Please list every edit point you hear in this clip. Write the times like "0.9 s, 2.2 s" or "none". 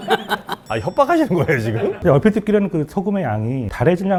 none